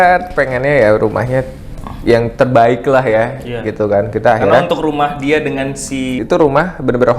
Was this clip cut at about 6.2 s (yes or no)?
yes